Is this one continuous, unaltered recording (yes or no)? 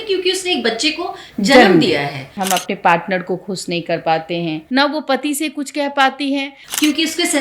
no